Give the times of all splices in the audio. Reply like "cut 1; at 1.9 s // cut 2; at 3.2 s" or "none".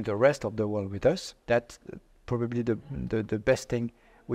cut 1; at 1.3 s